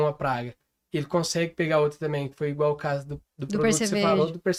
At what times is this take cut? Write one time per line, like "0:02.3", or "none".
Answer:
none